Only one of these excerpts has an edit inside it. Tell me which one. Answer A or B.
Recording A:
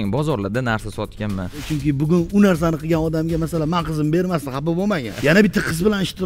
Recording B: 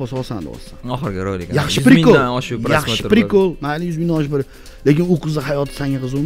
A